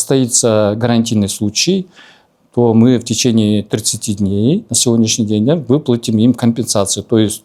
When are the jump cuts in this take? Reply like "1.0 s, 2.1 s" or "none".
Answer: none